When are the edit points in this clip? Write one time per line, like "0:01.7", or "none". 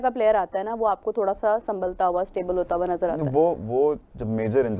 none